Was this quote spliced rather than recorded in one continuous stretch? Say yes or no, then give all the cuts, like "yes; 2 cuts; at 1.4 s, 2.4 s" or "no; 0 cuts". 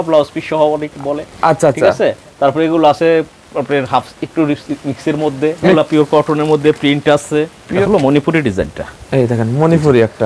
yes; 2 cuts; at 5.7 s, 7.6 s